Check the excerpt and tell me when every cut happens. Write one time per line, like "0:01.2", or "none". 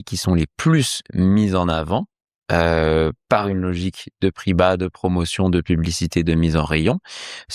none